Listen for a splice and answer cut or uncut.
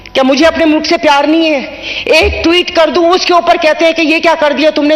uncut